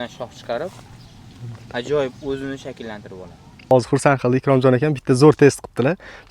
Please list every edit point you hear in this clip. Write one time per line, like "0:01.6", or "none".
0:03.7